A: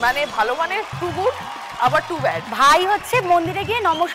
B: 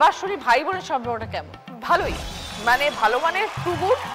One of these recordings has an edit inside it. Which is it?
A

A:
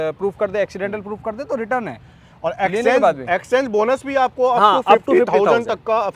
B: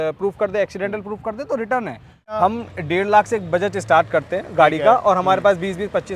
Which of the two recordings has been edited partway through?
B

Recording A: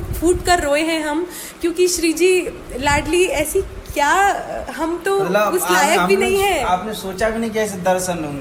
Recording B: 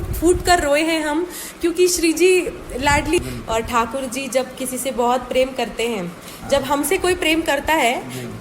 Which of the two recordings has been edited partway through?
B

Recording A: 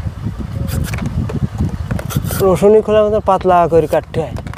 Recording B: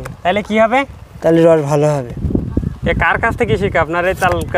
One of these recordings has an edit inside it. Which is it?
B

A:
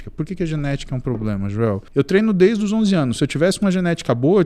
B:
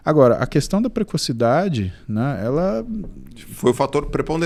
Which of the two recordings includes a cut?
A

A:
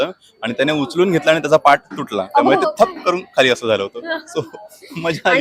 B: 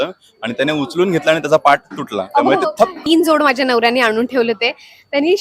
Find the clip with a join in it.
B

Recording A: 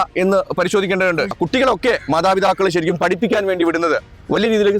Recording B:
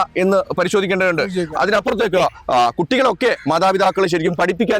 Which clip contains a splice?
A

